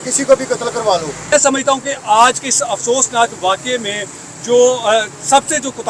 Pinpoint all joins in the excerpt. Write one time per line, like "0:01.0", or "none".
0:01.3